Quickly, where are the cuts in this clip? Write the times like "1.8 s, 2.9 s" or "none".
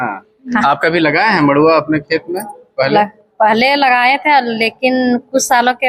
none